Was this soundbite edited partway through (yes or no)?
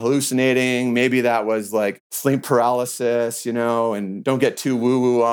yes